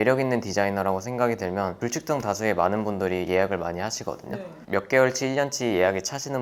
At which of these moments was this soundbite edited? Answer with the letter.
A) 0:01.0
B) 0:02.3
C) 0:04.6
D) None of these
C